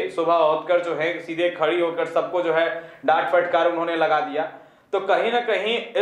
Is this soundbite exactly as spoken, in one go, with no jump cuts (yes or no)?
yes